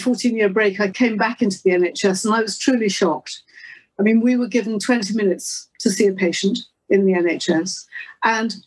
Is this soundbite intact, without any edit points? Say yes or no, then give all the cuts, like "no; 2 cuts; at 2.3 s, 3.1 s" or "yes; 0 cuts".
no; 1 cut; at 0.9 s